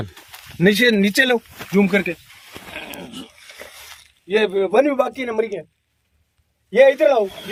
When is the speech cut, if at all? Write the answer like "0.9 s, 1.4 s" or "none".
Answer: none

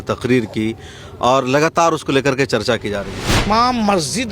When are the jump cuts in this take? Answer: 3.3 s

